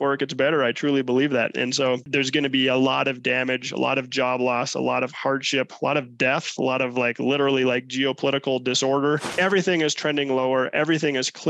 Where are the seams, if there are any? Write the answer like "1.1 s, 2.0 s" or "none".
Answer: 2.0 s, 9.3 s